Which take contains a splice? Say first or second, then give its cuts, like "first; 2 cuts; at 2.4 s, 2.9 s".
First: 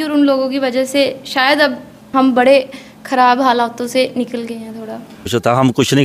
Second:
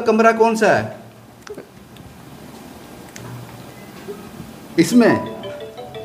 first; 2 cuts; at 1.9 s, 5.3 s